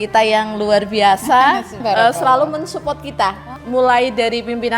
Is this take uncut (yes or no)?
no